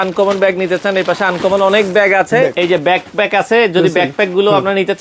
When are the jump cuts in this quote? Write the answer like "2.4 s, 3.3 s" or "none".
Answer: 2.5 s